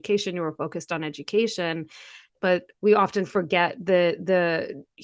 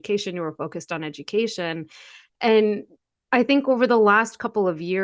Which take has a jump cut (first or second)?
first